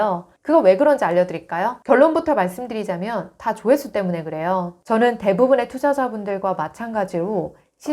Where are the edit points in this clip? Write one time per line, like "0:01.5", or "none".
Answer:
0:04.8